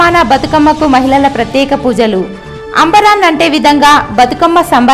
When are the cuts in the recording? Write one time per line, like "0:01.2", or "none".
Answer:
none